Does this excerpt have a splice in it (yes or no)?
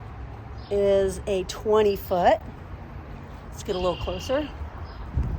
no